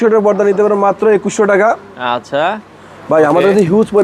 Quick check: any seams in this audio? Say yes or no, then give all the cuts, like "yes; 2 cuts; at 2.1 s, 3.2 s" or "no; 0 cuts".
no; 0 cuts